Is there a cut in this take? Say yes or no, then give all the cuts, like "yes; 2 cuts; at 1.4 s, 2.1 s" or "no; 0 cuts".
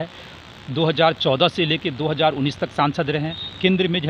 no; 0 cuts